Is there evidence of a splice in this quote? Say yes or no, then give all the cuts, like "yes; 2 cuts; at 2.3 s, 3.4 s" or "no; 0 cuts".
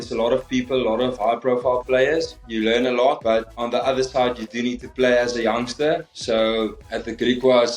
yes; 3 cuts; at 2.3 s, 3.2 s, 6.1 s